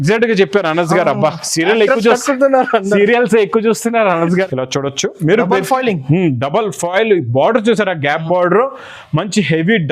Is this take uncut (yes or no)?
no